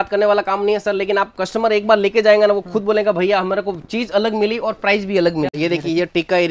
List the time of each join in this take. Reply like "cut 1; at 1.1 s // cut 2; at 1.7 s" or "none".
cut 1; at 5.5 s